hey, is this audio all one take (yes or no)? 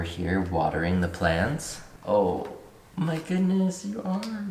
yes